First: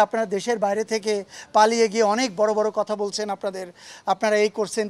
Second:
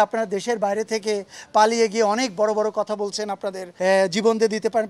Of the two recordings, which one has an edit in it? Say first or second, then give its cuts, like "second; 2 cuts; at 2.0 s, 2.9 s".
second; 1 cut; at 3.6 s